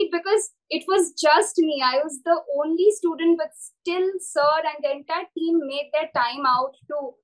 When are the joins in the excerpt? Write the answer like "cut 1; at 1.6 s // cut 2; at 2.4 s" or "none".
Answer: none